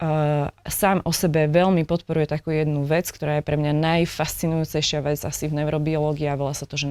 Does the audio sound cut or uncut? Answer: uncut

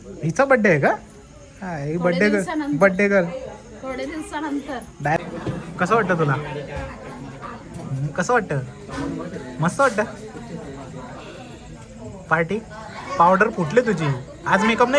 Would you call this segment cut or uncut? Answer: cut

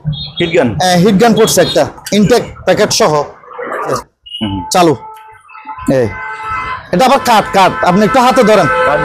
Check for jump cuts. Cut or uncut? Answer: cut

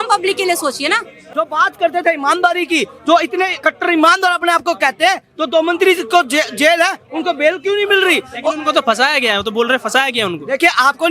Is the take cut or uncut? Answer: cut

